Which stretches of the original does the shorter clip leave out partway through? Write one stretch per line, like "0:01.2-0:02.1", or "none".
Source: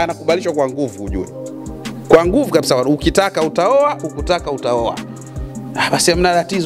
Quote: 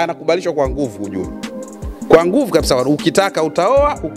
none